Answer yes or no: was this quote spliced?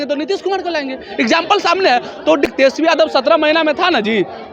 yes